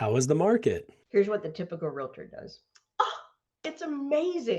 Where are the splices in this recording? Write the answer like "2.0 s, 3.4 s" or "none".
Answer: 0.9 s